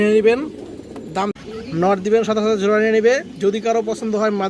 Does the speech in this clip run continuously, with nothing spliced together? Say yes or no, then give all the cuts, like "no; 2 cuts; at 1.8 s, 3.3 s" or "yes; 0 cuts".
no; 1 cut; at 1.3 s